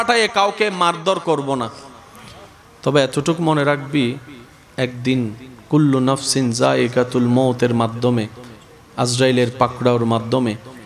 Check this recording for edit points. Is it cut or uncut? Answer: uncut